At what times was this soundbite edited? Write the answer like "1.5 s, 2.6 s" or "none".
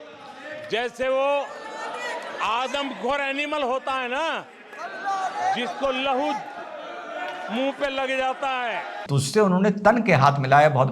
9.0 s